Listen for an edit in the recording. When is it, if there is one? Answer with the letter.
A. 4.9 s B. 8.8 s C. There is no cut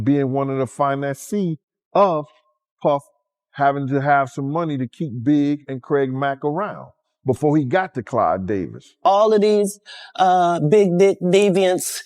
B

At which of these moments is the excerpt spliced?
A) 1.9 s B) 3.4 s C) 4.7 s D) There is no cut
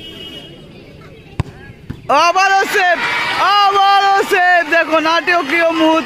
D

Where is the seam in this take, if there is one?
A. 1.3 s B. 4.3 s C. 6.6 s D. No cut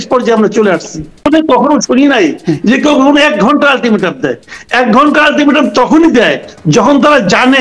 A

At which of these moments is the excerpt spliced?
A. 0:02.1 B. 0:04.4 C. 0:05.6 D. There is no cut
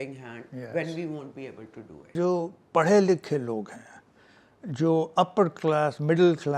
A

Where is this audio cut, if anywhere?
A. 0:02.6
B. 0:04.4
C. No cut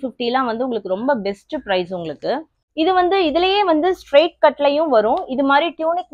A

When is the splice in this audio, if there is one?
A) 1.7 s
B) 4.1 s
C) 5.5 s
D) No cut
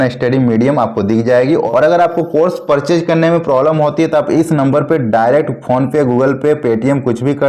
A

